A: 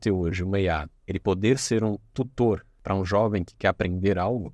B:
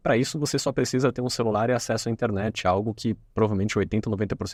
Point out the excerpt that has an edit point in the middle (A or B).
A